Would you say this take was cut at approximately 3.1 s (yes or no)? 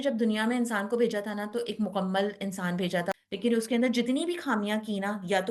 yes